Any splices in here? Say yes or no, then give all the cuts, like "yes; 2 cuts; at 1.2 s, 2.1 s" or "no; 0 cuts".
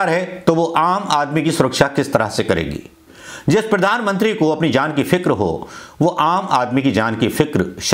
no; 0 cuts